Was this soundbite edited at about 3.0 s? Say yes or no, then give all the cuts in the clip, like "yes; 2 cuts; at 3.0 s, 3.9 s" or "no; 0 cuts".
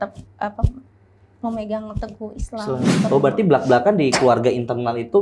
yes; 1 cut; at 3.0 s